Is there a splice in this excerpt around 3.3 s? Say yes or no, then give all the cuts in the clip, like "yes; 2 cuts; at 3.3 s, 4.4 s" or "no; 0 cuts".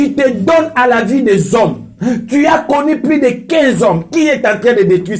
no; 0 cuts